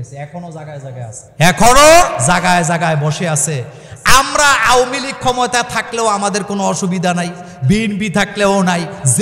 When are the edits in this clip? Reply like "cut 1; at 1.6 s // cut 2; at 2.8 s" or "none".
cut 1; at 1.2 s // cut 2; at 2.2 s